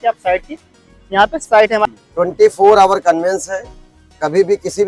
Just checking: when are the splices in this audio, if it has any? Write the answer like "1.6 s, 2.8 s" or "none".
1.8 s